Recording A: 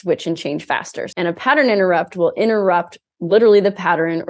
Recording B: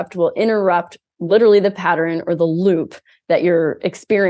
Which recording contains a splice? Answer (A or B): A